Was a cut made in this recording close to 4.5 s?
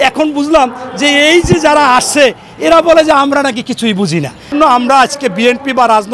yes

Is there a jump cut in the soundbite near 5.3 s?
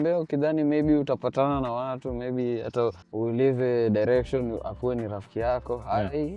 no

